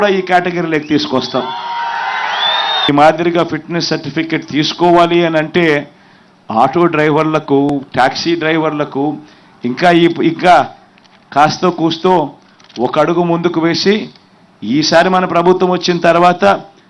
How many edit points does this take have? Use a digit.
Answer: 1